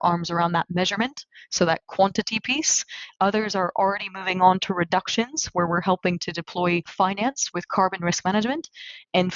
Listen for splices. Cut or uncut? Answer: cut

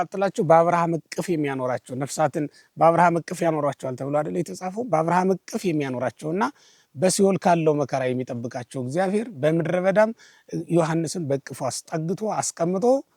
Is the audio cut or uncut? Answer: uncut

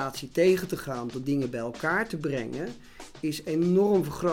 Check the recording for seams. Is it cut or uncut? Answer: uncut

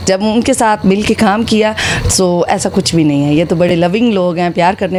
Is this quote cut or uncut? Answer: uncut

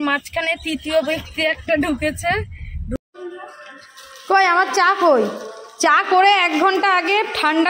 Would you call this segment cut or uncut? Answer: cut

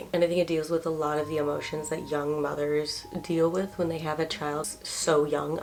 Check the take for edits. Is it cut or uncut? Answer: uncut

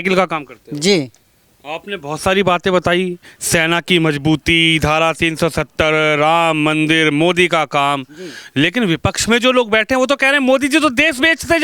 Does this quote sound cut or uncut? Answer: uncut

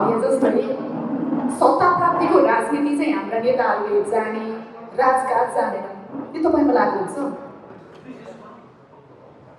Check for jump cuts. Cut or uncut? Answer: uncut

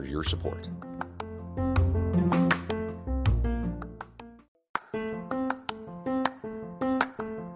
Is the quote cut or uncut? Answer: cut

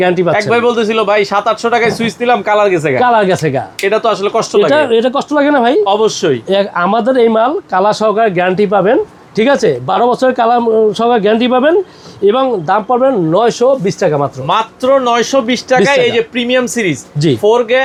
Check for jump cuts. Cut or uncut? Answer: uncut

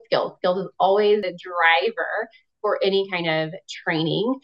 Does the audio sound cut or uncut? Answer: cut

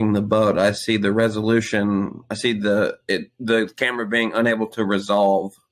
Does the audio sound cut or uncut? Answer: uncut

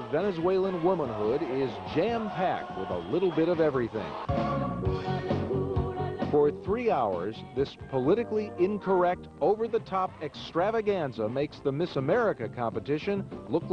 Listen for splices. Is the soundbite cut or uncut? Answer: uncut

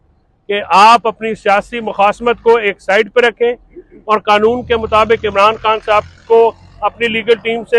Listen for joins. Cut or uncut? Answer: uncut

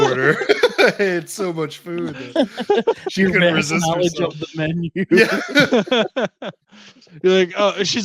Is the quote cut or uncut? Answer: uncut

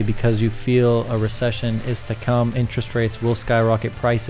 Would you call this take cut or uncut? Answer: uncut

